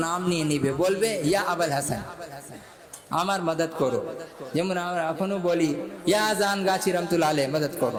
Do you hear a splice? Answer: no; 0 cuts

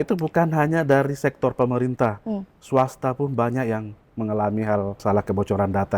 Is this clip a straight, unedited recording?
no; 1 cut; at 5.0 s

